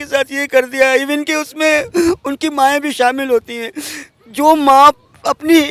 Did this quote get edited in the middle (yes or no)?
no